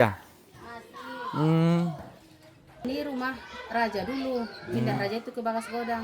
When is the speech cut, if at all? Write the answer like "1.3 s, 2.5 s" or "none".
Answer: 2.8 s